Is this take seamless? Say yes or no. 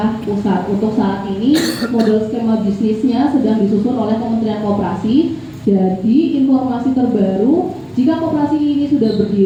yes